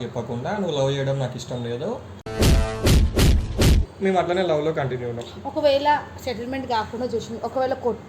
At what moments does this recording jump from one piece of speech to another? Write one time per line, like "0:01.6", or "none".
0:03.9

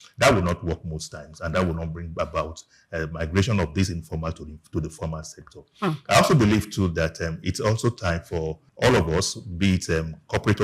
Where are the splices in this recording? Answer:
0:08.6

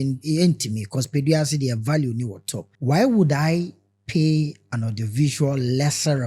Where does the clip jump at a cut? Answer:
0:02.7

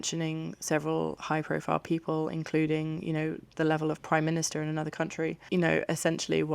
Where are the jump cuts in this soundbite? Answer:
0:05.4

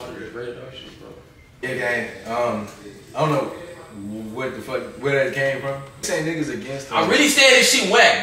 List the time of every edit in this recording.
0:01.6
0:06.1

